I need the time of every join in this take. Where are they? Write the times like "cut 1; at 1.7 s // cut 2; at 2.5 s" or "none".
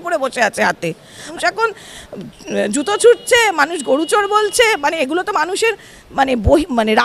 cut 1; at 1.3 s